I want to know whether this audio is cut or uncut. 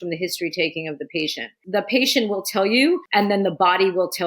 cut